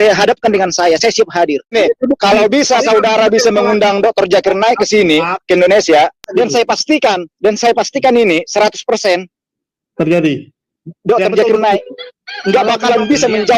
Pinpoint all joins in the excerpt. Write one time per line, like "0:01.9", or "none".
0:01.7
0:06.2